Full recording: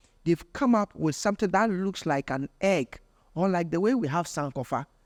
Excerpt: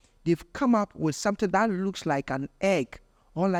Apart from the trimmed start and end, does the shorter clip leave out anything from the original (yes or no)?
no